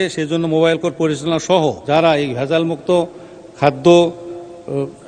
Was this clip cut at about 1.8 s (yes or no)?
yes